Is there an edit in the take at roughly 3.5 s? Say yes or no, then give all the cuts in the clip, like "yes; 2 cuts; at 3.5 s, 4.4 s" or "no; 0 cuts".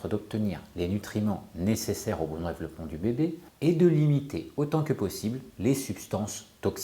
yes; 1 cut; at 3.5 s